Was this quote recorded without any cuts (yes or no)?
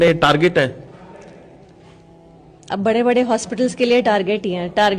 yes